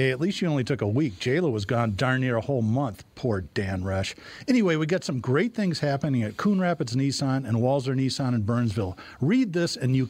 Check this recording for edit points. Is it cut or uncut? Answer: uncut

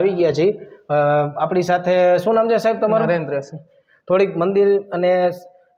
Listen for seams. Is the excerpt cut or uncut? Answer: uncut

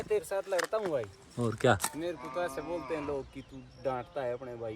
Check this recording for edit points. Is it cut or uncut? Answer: uncut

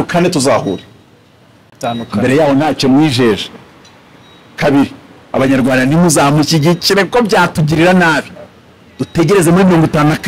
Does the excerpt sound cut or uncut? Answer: uncut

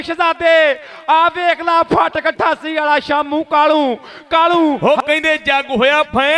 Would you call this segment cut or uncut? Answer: cut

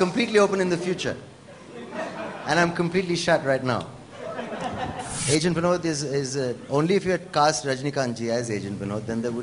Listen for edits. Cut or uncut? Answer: cut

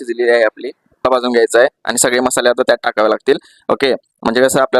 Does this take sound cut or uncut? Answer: cut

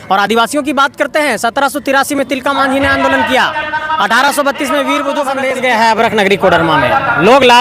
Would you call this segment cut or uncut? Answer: cut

